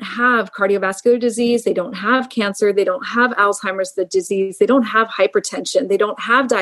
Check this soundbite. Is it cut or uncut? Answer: uncut